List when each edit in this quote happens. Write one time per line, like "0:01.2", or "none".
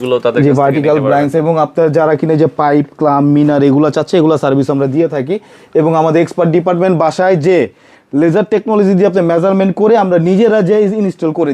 none

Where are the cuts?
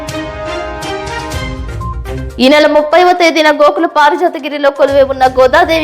0:02.2

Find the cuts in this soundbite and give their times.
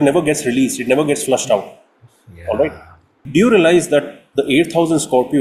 0:03.2

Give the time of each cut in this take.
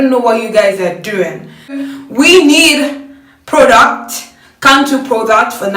0:01.8

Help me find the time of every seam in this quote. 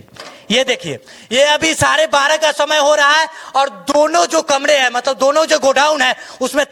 none

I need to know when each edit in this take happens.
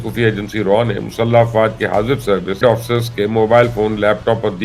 0:02.6

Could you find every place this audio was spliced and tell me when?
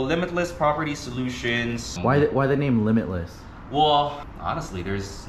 0:02.0
0:04.3

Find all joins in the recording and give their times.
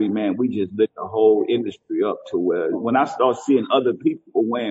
0:02.8

